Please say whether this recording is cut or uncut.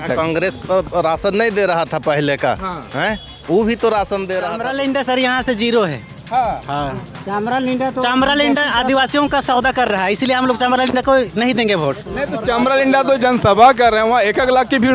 cut